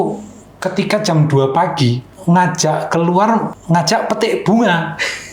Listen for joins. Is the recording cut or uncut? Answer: cut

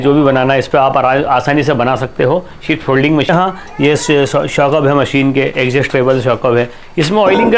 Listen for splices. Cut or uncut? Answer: cut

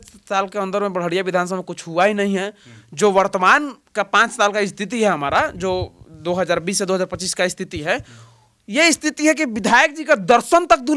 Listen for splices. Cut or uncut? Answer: uncut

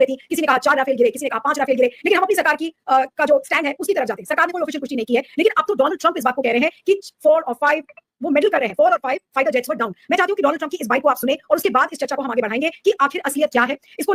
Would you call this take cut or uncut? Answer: uncut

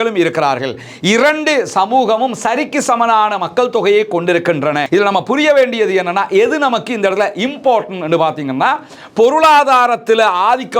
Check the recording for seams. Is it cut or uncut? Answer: cut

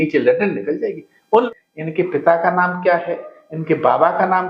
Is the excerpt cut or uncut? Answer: cut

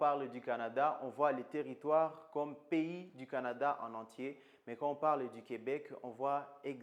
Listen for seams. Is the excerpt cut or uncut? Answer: uncut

